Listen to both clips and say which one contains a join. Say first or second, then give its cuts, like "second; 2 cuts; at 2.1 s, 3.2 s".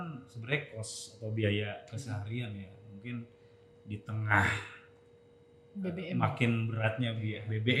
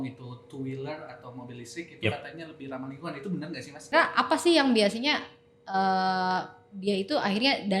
second; 1 cut; at 3.9 s